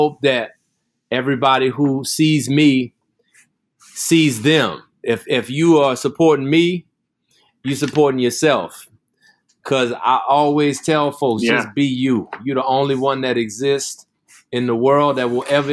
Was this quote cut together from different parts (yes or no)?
no